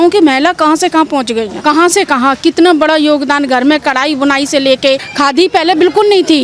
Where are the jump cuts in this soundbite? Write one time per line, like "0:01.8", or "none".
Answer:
0:01.5
0:05.1